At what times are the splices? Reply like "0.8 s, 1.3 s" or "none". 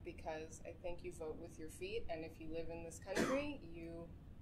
none